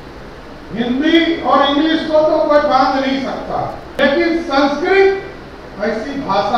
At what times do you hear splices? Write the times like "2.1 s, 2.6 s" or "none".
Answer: 4.0 s